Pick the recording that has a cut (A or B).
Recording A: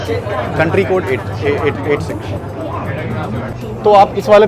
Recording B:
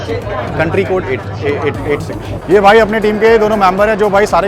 B